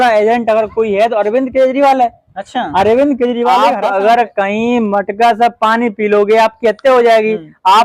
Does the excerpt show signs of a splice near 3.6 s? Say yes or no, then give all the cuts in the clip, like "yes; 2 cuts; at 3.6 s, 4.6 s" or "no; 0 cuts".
yes; 1 cut; at 3.6 s